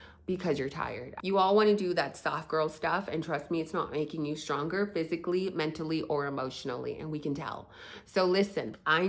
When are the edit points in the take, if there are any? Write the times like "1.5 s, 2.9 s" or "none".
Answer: 1.0 s